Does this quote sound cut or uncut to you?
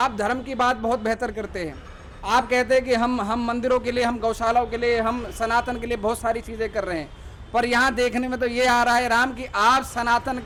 uncut